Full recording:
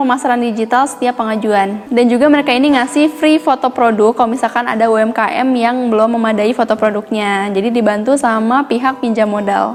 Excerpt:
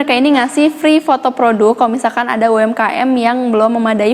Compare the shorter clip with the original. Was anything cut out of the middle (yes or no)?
no